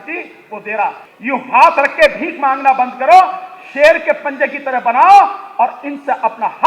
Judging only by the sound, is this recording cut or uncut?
cut